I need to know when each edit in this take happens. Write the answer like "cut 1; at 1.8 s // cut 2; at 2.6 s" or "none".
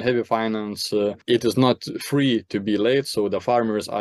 cut 1; at 1.2 s